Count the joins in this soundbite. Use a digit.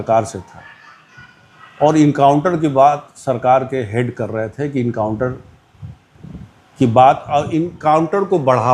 0